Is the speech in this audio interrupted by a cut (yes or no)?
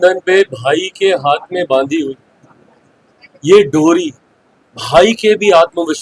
no